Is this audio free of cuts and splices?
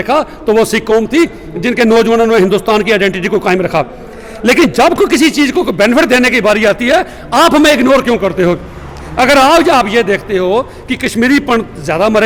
yes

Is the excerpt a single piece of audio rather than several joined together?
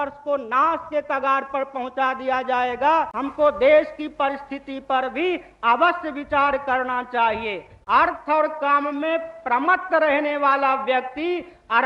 no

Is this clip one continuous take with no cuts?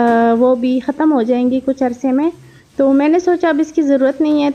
yes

